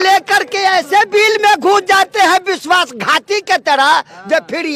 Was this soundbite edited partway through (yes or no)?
no